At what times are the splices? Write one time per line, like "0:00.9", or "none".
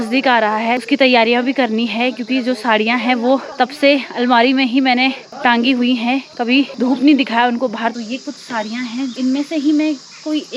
0:00.8
0:03.5
0:05.3
0:06.7
0:07.9
0:09.1